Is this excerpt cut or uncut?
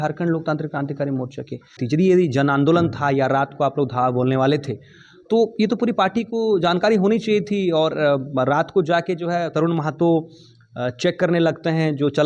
cut